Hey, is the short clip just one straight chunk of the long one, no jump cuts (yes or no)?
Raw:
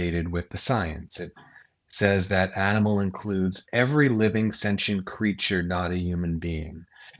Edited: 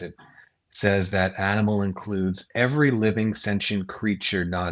yes